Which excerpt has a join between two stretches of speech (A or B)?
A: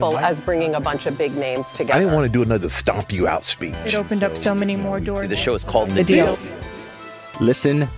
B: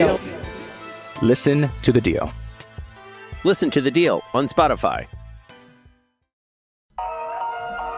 B